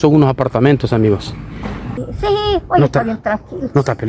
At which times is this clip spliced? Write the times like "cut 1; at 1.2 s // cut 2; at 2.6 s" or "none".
cut 1; at 1.9 s